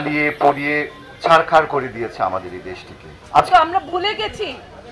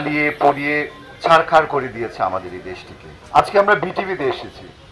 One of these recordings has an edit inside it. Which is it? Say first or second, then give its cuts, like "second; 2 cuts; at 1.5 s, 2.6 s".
first; 1 cut; at 3.5 s